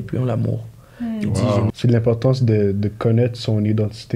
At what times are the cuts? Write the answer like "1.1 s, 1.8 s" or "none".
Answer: 1.7 s